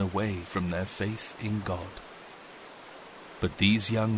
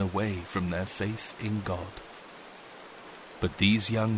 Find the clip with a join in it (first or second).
first